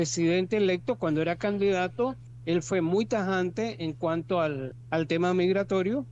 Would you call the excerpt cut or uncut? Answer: cut